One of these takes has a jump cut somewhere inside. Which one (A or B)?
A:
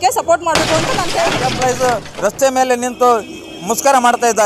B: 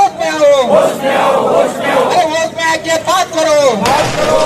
A